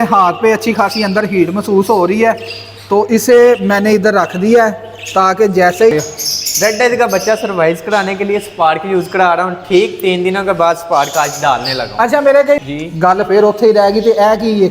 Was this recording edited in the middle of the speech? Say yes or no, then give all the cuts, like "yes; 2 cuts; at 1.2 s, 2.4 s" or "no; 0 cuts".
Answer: yes; 2 cuts; at 5.9 s, 12.6 s